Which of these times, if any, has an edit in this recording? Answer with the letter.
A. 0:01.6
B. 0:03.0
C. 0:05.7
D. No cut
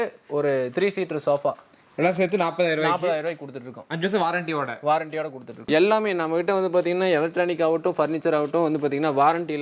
C